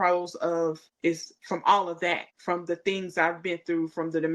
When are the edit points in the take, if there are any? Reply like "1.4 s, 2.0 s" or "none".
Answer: 0.9 s, 2.3 s